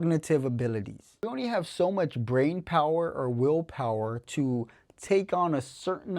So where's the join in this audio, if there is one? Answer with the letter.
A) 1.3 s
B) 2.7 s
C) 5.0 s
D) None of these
A